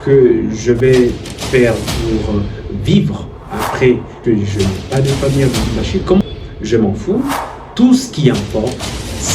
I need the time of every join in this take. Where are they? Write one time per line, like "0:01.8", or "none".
0:04.1
0:06.2

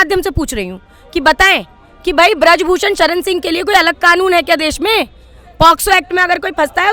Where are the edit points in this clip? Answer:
none

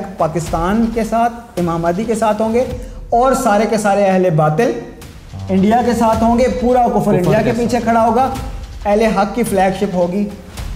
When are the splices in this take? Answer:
none

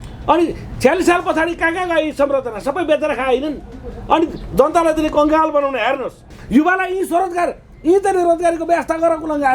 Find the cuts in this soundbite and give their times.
0:06.3

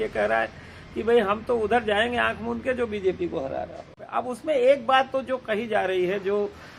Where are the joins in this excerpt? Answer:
0:04.0

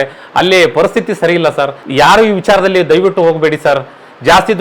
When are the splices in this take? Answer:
0:01.8

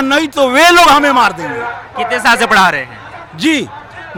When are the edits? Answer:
none

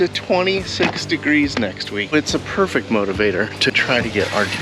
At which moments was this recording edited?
0:02.1
0:03.7

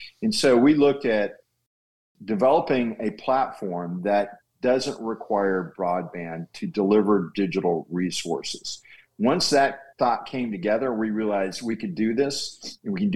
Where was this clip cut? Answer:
0:01.9

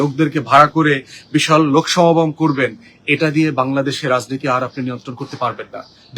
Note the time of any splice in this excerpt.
none

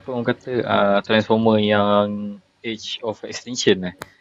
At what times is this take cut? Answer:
none

